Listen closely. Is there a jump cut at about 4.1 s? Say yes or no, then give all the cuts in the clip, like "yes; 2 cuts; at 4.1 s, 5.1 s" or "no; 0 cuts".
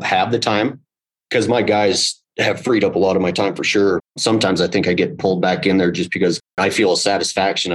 yes; 2 cuts; at 4.1 s, 6.6 s